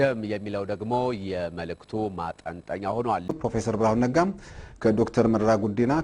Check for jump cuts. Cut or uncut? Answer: cut